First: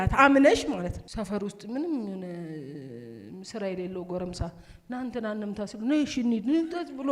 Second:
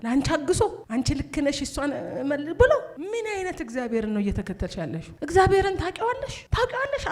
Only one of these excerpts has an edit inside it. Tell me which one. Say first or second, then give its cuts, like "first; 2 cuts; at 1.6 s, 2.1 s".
first; 1 cut; at 1.1 s